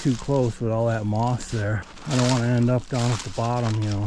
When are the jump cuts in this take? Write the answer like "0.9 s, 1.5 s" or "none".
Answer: 1.9 s